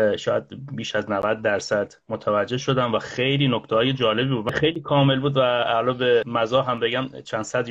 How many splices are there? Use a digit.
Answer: 1